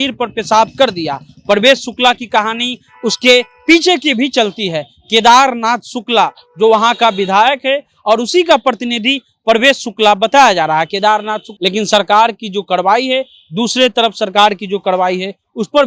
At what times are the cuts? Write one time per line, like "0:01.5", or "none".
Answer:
0:11.5